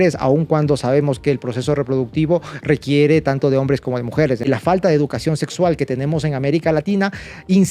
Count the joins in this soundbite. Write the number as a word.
one